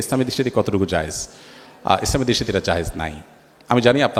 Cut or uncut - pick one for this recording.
uncut